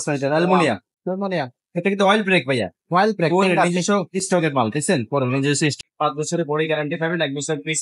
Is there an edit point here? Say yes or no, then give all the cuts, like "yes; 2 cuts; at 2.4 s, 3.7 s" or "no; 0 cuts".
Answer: yes; 1 cut; at 5.8 s